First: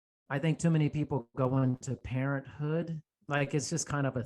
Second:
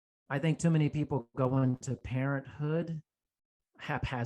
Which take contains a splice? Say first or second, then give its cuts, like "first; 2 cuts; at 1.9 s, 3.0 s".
first; 1 cut; at 3.1 s